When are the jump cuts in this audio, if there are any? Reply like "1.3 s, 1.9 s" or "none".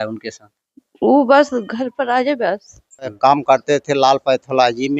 3.0 s